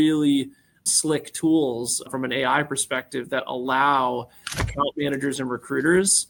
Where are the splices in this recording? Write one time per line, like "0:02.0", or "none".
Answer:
none